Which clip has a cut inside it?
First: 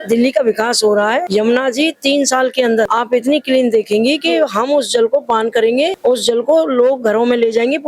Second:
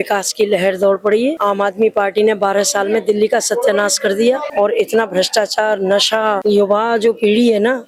first; 3 cuts; at 1.3 s, 2.9 s, 6.0 s

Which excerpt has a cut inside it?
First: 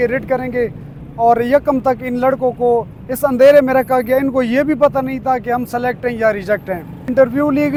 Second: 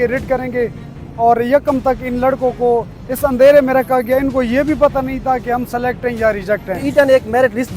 second; 1 cut; at 6.8 s

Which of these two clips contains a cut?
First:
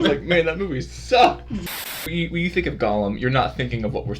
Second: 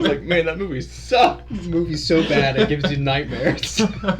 first; 1 cut; at 1.6 s

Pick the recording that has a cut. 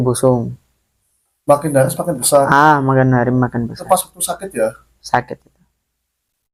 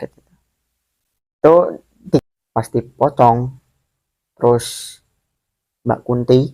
second; 1 cut; at 2.2 s

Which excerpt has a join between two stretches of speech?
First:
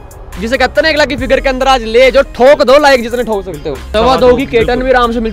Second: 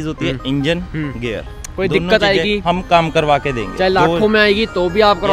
first; 1 cut; at 3.8 s

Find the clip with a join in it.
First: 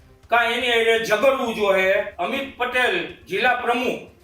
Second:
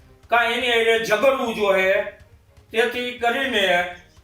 first; 1 cut; at 2.1 s

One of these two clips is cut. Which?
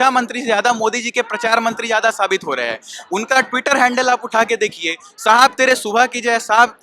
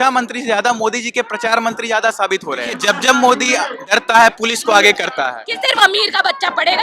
second; 2 cuts; at 2.7 s, 5.5 s

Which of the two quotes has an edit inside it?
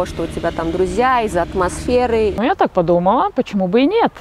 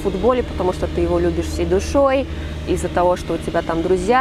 first; 1 cut; at 2.3 s

